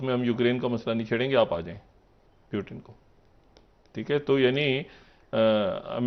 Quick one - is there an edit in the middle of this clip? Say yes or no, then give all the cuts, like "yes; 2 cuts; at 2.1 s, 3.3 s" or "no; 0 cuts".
no; 0 cuts